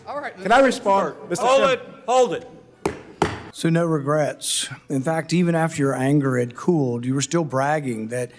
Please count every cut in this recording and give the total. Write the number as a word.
one